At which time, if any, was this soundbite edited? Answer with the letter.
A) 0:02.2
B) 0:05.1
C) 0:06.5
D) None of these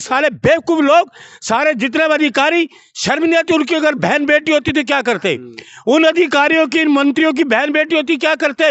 D